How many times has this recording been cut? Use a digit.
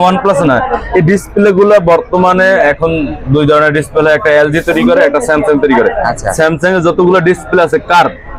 0